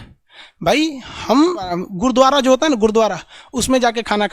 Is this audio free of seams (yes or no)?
no